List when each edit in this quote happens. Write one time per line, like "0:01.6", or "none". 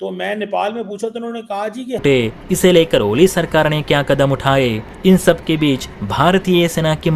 0:02.0